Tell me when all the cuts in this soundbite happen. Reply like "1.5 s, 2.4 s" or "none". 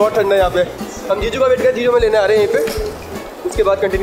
none